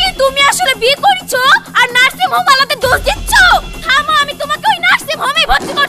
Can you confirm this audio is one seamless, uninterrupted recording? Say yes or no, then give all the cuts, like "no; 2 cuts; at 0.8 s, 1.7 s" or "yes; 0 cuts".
yes; 0 cuts